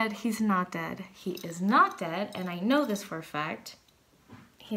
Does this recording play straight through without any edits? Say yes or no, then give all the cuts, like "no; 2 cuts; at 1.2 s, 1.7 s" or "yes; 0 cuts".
yes; 0 cuts